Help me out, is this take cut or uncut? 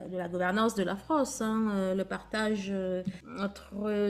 uncut